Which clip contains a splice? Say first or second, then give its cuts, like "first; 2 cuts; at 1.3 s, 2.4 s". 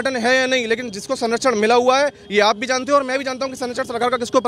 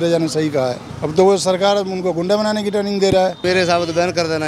second; 2 cuts; at 0.9 s, 3.4 s